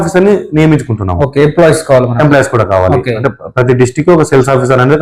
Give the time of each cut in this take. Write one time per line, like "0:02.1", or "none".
none

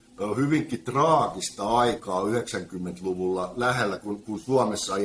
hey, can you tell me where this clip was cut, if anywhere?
none

